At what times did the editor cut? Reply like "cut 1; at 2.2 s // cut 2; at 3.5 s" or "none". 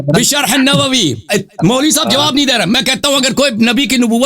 cut 1; at 1.2 s

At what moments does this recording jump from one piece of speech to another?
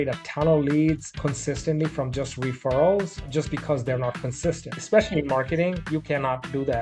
cut 1; at 4.8 s

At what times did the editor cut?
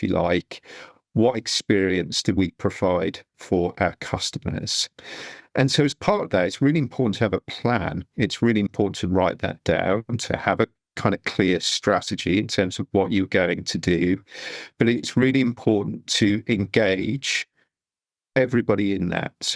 none

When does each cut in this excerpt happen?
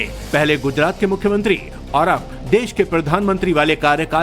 cut 1; at 2.9 s

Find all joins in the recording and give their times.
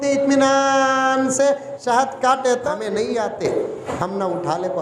cut 1; at 2.7 s // cut 2; at 3.8 s

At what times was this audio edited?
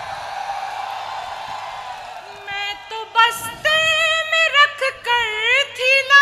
cut 1; at 2.7 s

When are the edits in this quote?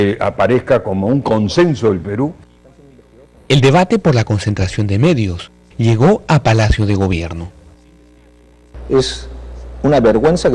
cut 1; at 2.4 s

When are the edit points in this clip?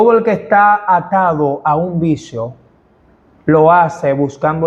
none

